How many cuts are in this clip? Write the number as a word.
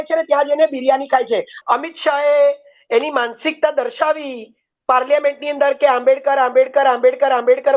one